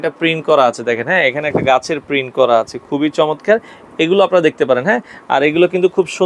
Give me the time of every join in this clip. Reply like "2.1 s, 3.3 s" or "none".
none